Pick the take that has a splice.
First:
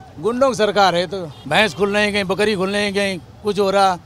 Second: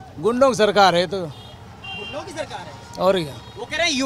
first; 1 cut; at 1.3 s

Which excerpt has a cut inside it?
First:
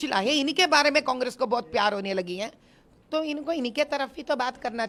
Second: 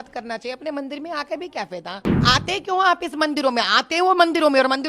second; 1 cut; at 2.2 s

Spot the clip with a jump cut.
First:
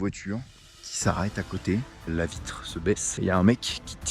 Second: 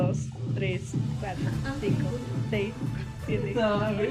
first; 2 cuts; at 2.1 s, 3.1 s

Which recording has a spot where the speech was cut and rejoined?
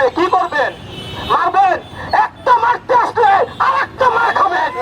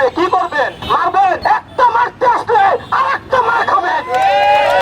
second; 1 cut; at 1.2 s

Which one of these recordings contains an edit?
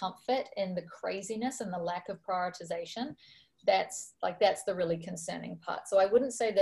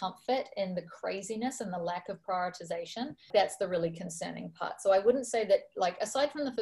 second; 1 cut; at 3.3 s

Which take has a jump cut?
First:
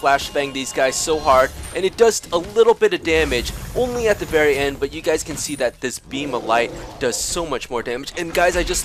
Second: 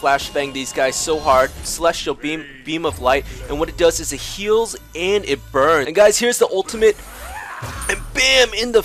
second; 2 cuts; at 1.7 s, 5.9 s

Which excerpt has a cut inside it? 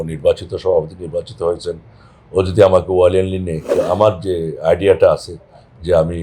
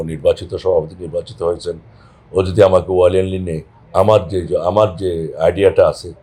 first; 1 cut; at 3.7 s

